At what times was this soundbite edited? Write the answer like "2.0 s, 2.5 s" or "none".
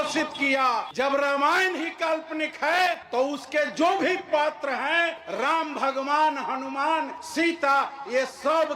0.9 s, 3.0 s, 5.2 s, 7.2 s